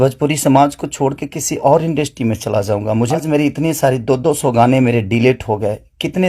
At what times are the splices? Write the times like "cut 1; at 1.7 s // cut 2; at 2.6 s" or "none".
cut 1; at 3.2 s